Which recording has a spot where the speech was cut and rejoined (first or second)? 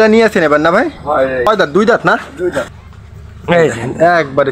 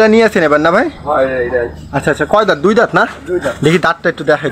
first